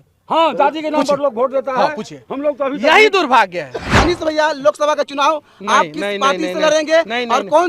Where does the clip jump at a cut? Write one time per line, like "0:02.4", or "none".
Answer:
0:03.8